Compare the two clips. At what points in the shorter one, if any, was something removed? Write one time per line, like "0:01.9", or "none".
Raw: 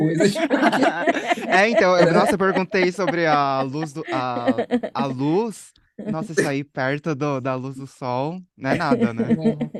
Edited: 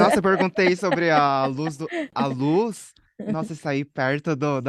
0:02.1